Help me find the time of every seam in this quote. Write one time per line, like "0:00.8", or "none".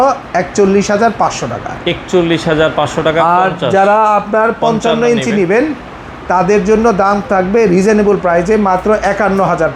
none